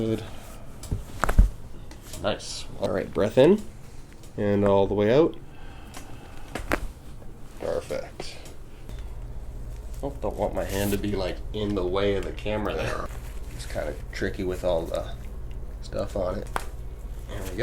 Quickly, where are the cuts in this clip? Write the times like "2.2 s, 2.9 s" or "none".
2.9 s, 8.9 s, 13.1 s, 16.5 s